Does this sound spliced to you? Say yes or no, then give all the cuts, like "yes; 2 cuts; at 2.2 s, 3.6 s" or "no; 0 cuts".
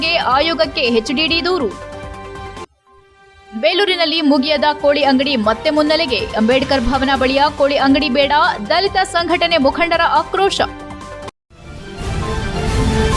yes; 1 cut; at 11.4 s